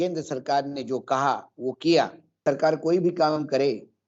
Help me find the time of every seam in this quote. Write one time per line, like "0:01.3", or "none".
0:02.4